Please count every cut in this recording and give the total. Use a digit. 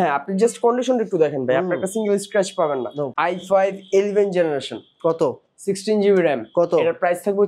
1